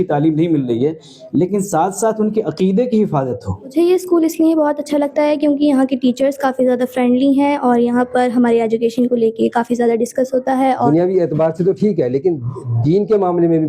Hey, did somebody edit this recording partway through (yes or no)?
yes